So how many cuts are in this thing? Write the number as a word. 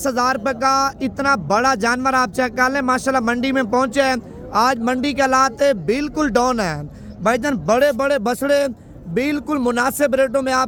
zero